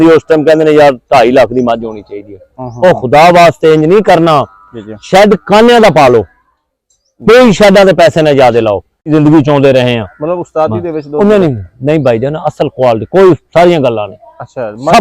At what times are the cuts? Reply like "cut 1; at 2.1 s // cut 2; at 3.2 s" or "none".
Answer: cut 1; at 9.1 s